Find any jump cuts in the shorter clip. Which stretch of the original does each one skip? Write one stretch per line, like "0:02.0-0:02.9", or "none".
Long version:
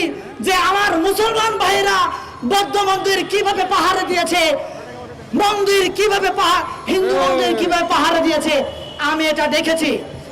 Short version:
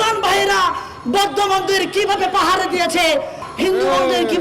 0:04.8-0:06.7